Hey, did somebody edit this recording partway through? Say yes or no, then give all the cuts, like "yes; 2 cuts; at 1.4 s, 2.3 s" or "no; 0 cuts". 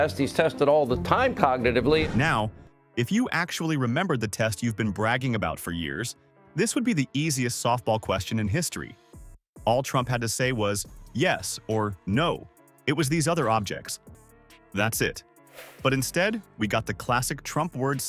no; 0 cuts